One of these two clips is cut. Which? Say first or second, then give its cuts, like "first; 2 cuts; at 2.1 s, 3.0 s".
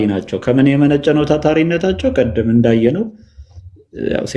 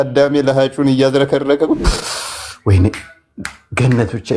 second; 1 cut; at 1.9 s